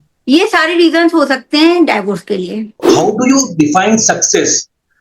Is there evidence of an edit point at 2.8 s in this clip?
yes; 1 cut; at 2.8 s

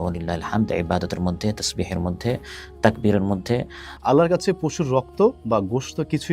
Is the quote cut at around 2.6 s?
no; 1 cut; at 3.9 s

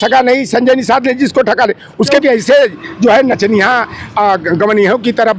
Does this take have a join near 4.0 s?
no; 1 cut; at 2.2 s

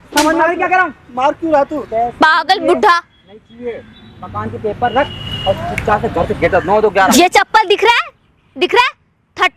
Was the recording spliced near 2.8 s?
no; 1 cut; at 7.1 s

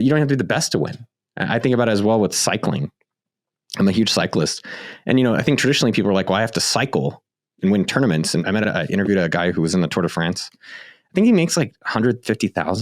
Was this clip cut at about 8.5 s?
yes; 1 cut; at 8.5 s

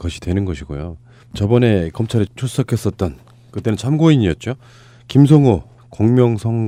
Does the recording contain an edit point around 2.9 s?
no; 0 cuts

